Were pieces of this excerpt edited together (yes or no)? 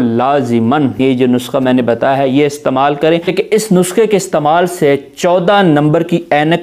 yes